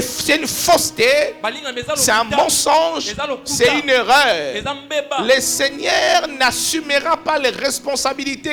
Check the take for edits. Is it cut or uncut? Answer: uncut